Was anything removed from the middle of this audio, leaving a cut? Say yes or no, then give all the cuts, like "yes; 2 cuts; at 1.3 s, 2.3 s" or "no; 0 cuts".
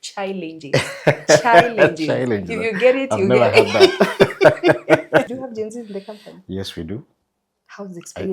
yes; 1 cut; at 5.3 s